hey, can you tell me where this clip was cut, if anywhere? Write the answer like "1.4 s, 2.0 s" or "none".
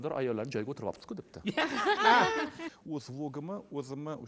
2.7 s